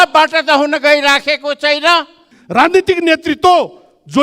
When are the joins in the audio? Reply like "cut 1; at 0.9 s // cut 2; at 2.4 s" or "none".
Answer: cut 1; at 2.3 s